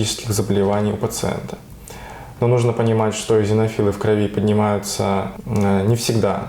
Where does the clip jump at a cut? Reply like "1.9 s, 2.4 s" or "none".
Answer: none